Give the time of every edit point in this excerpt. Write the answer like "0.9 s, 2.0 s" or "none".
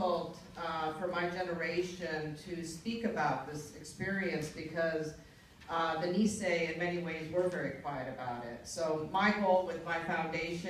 none